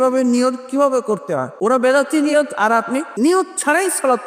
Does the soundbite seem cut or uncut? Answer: cut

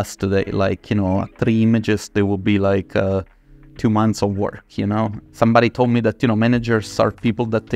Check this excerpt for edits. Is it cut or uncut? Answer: cut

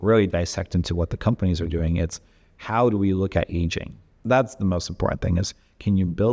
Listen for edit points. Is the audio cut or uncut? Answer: cut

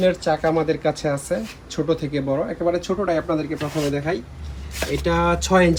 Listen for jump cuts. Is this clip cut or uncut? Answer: uncut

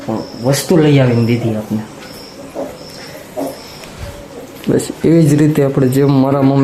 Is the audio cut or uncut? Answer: uncut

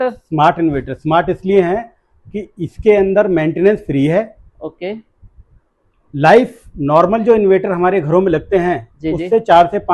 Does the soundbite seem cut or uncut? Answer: uncut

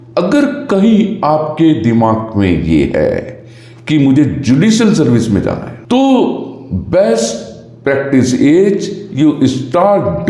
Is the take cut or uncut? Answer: uncut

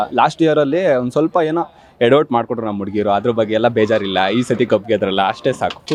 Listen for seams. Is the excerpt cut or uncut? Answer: uncut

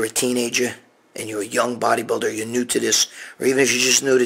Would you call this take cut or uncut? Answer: uncut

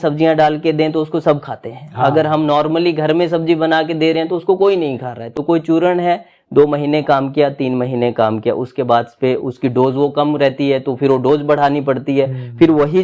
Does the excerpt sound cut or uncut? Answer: cut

